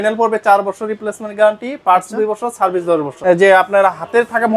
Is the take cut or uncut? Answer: cut